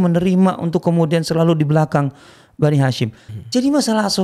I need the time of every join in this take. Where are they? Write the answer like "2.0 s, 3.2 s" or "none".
none